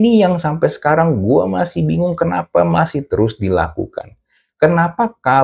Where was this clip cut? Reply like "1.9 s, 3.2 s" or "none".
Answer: none